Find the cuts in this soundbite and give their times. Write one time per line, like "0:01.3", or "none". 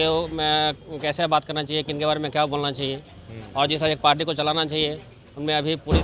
none